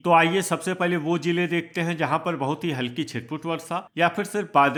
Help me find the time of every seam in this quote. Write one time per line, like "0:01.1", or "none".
none